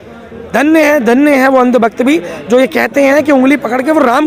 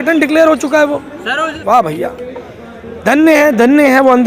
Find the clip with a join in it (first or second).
second